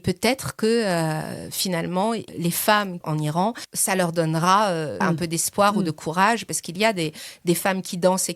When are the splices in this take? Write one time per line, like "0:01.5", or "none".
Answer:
0:03.2
0:05.0